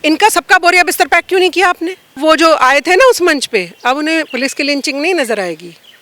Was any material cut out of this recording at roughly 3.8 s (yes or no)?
no